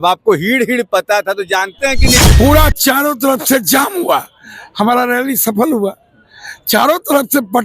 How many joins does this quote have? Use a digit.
1